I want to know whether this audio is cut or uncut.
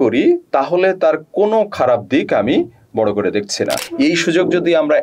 cut